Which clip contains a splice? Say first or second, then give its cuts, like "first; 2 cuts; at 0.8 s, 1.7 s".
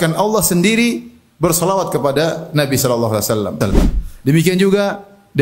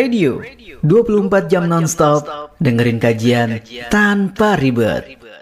first; 1 cut; at 3.6 s